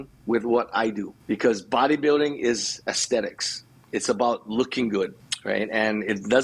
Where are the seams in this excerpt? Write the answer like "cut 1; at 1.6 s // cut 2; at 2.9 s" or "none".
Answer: cut 1; at 1.1 s // cut 2; at 5.3 s